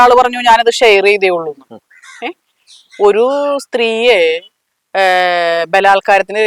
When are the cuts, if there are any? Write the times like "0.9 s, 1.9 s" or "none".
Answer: none